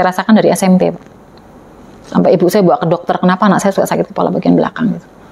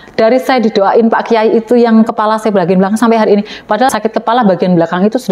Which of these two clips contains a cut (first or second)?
second